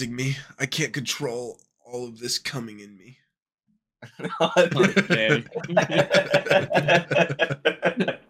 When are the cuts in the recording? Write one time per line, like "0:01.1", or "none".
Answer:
none